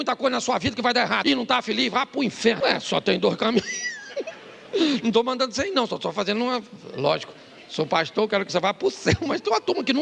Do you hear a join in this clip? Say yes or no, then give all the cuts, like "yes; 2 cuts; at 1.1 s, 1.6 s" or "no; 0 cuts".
yes; 2 cuts; at 1.2 s, 2.6 s